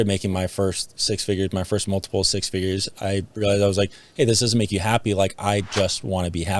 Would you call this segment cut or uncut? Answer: uncut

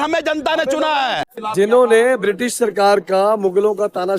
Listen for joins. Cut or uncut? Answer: cut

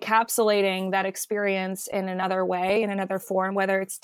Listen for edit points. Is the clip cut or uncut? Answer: uncut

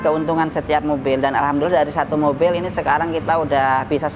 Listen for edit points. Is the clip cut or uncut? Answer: uncut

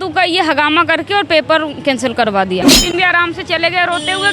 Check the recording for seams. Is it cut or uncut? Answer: cut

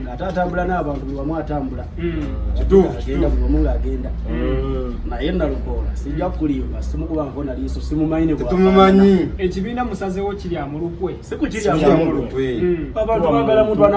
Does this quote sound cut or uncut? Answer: uncut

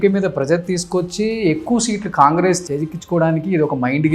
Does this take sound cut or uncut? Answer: cut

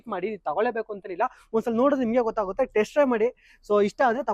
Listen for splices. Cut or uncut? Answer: uncut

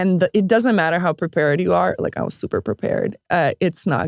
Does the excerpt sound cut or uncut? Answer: uncut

